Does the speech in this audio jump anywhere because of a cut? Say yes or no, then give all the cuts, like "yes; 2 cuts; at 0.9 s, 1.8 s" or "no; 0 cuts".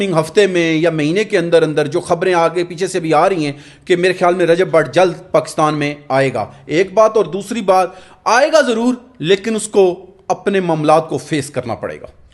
no; 0 cuts